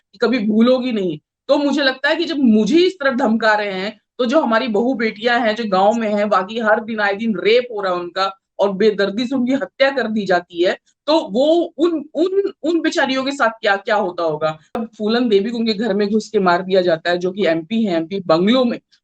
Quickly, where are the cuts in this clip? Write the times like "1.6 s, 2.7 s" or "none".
14.8 s